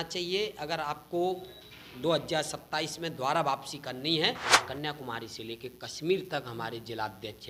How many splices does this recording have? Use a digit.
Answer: 1